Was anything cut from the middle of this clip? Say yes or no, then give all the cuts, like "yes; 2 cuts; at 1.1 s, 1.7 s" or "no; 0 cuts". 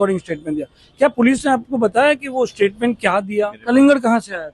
yes; 1 cut; at 3.6 s